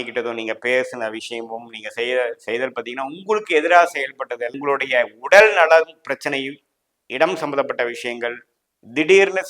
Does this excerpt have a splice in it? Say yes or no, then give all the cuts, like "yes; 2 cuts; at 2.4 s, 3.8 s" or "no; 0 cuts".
yes; 1 cut; at 4.5 s